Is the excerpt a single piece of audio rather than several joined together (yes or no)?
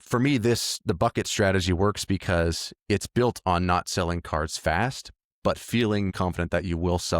no